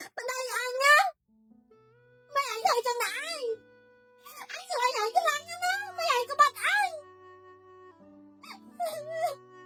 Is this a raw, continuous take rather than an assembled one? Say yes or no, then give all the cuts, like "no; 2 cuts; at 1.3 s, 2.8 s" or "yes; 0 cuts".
yes; 0 cuts